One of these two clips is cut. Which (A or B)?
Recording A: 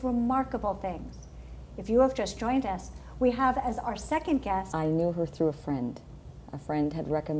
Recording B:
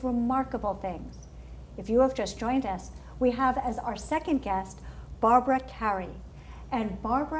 B